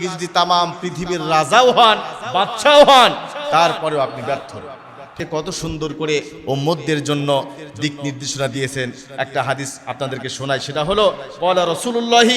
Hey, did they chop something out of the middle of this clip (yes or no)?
no